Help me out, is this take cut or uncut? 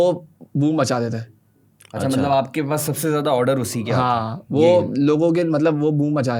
uncut